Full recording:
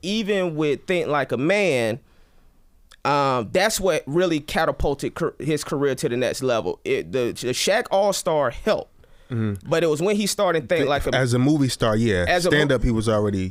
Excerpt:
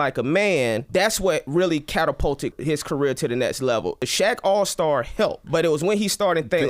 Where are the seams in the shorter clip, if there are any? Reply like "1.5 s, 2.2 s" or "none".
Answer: 0.9 s, 2.6 s, 4.0 s, 5.4 s